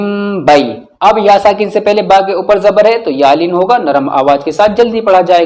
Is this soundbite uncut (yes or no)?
yes